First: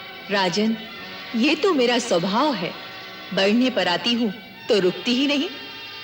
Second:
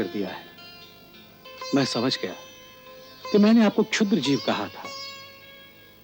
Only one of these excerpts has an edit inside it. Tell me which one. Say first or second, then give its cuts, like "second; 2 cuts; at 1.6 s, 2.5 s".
second; 1 cut; at 1.4 s